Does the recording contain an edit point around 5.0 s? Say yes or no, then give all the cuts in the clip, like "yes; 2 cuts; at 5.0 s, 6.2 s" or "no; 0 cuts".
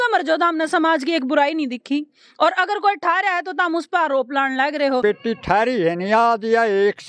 yes; 1 cut; at 5.0 s